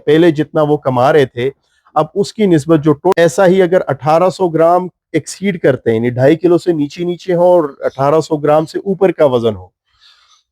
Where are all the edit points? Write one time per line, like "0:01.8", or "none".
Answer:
0:03.1